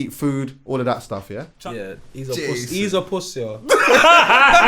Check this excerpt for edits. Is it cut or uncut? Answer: cut